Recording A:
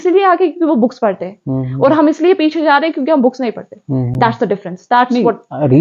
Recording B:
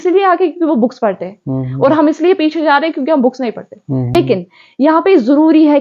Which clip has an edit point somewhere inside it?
B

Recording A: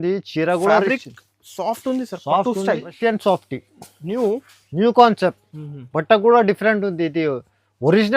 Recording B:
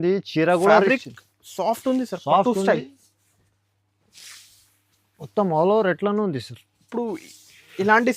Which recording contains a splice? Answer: A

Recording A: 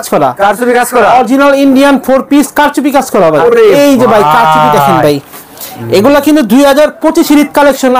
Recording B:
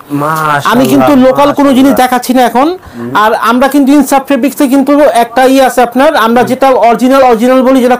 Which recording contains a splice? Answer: A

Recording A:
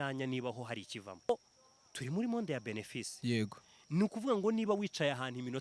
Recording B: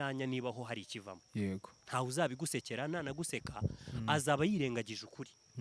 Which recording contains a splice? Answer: A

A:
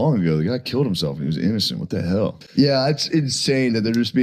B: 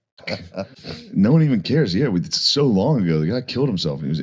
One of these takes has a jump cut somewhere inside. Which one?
B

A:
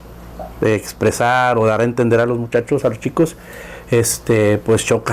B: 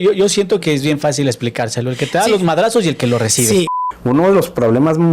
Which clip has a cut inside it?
B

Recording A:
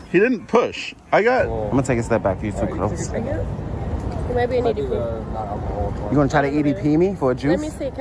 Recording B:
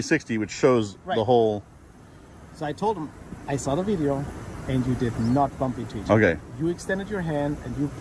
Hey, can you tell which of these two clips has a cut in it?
A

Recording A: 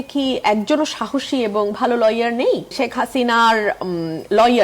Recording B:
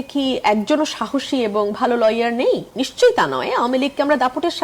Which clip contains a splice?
A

